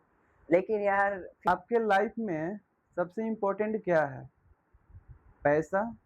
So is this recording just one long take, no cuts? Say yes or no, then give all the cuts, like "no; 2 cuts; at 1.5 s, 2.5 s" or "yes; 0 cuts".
no; 1 cut; at 1.5 s